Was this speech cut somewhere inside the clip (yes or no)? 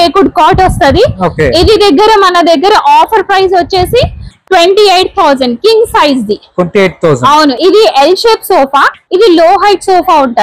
yes